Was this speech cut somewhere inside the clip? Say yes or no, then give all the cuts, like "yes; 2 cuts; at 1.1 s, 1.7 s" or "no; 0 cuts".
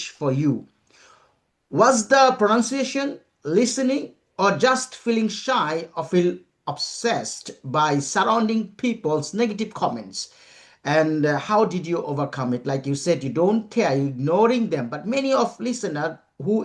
no; 0 cuts